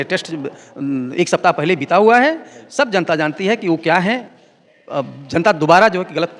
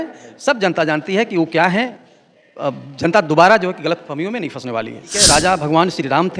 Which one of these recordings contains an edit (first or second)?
second